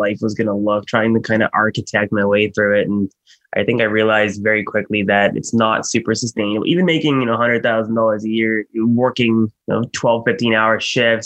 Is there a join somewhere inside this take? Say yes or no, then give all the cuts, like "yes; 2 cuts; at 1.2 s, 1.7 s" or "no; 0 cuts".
no; 0 cuts